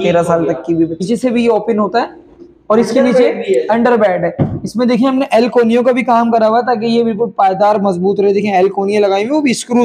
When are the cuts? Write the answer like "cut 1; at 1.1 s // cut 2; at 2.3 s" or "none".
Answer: cut 1; at 1.0 s